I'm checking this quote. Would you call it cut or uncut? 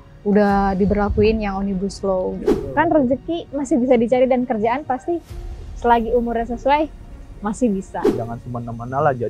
cut